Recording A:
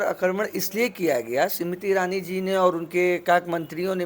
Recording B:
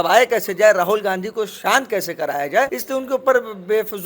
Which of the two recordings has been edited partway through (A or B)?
B